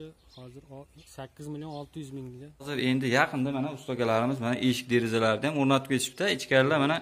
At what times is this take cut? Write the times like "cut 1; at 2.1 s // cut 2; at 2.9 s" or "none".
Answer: cut 1; at 2.7 s